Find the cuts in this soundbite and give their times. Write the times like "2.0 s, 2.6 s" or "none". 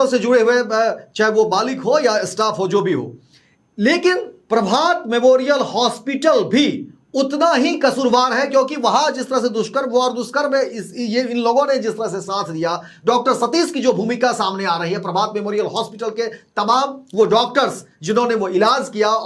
none